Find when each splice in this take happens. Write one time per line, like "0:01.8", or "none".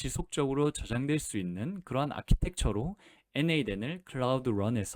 none